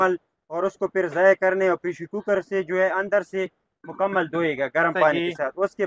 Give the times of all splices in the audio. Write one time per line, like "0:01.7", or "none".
none